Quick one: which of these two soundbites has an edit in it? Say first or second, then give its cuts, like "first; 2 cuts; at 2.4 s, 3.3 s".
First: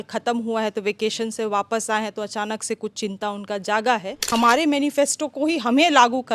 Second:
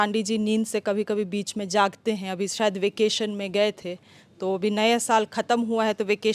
first; 1 cut; at 4.2 s